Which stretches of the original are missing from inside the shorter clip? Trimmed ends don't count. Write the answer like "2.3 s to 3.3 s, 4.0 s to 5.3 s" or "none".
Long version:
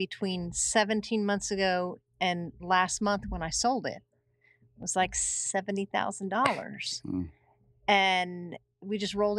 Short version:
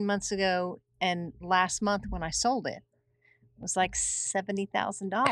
none